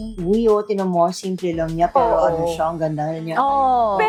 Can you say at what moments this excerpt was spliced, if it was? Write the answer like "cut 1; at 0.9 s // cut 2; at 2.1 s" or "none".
none